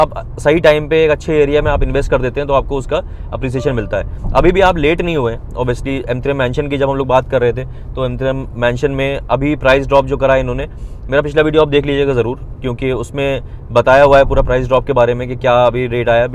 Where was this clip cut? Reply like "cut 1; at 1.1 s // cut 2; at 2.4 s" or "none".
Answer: none